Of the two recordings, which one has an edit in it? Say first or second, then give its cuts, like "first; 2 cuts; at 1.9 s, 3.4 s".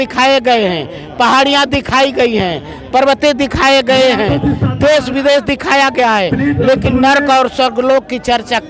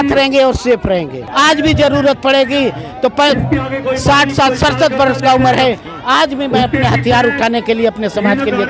second; 1 cut; at 1.2 s